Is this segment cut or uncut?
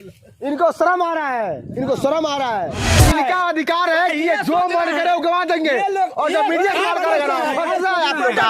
cut